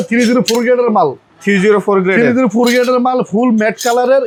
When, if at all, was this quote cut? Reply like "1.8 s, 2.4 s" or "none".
none